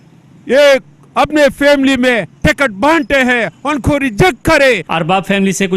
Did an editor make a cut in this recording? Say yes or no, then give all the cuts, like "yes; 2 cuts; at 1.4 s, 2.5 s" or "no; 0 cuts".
yes; 1 cut; at 4.9 s